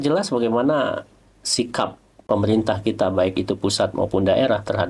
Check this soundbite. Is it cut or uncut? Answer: cut